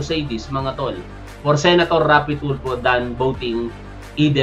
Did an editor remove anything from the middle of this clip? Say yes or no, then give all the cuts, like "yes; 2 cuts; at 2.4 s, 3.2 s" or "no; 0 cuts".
no; 0 cuts